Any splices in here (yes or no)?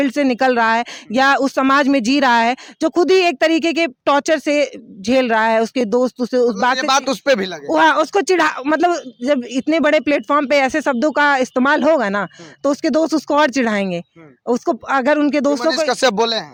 no